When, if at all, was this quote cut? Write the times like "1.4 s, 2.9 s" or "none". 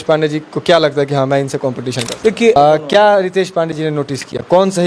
2.6 s